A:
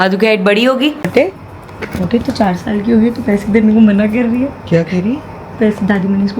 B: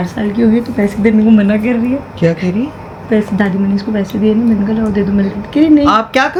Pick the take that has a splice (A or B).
A